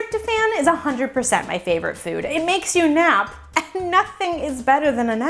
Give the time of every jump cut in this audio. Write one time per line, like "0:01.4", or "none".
none